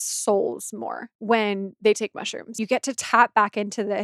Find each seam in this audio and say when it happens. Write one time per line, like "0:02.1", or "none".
0:01.1
0:02.5